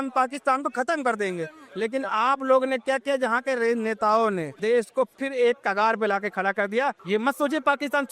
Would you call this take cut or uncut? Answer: cut